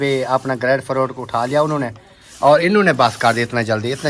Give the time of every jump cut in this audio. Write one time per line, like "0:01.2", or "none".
none